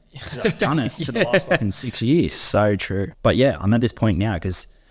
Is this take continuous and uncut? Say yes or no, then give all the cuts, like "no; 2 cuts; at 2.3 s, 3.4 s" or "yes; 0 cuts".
no; 1 cut; at 3.1 s